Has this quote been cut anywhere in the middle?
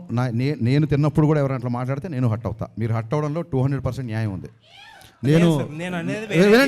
no; 0 cuts

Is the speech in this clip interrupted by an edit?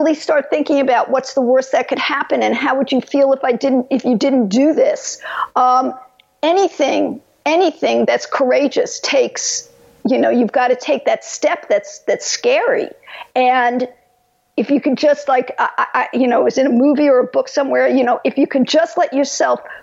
no; 0 cuts

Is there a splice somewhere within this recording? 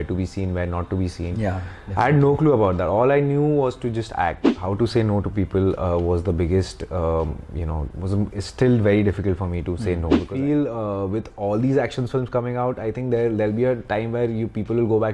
yes; 2 cuts; at 4.5 s, 10.2 s

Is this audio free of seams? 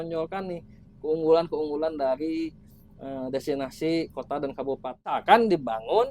no; 1 cut; at 5.2 s

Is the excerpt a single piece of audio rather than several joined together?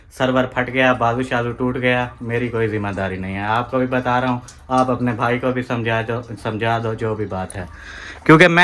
yes; 0 cuts

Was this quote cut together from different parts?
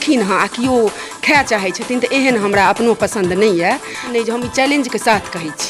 yes; 1 cut; at 4.1 s

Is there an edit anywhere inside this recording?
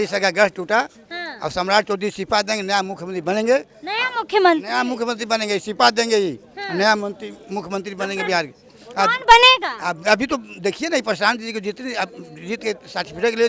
no; 0 cuts

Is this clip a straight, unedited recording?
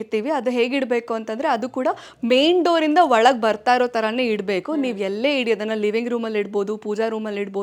yes; 0 cuts

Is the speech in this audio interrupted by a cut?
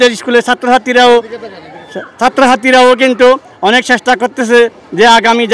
no; 0 cuts

